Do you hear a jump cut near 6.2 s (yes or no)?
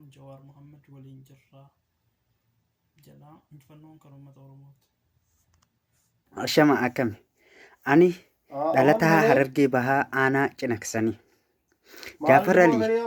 yes